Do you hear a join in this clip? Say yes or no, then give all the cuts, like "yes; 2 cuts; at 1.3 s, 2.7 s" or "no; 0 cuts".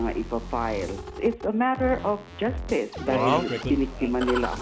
yes; 1 cut; at 2.9 s